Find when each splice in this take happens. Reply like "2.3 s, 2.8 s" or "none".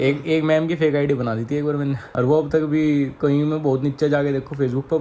none